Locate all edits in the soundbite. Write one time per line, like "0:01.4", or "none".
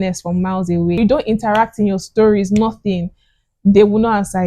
0:01.0